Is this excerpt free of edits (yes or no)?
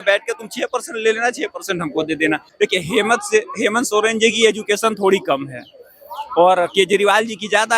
no